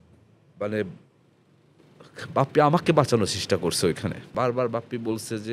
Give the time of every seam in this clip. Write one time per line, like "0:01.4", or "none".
0:04.3

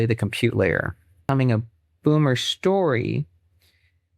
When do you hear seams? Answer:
0:01.2

